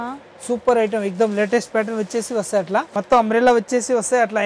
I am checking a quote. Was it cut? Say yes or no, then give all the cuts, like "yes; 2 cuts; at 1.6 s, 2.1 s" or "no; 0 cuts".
yes; 1 cut; at 2.9 s